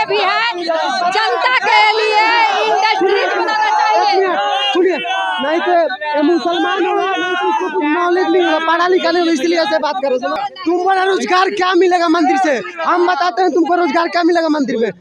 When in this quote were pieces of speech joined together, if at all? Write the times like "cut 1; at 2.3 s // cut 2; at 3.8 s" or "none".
none